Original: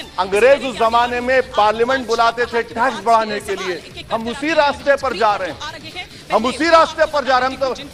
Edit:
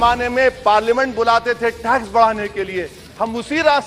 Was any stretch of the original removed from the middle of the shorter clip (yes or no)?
no